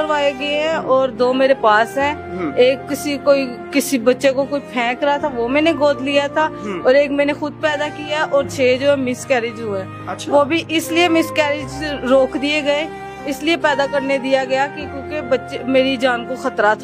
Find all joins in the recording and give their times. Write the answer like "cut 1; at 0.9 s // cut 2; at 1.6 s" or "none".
none